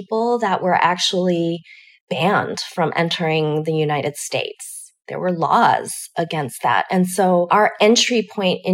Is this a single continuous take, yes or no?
yes